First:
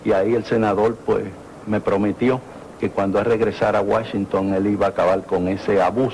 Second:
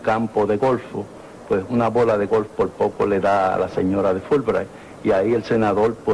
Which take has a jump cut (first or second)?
first